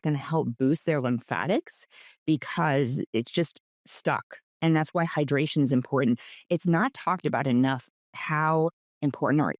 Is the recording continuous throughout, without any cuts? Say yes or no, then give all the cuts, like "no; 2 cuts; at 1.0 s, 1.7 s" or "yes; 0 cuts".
yes; 0 cuts